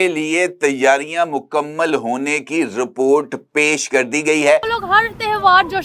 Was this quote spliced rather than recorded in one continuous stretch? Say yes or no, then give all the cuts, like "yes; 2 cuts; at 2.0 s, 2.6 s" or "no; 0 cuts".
yes; 1 cut; at 4.7 s